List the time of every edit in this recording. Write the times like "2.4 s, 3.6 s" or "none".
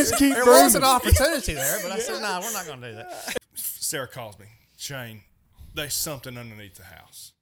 3.4 s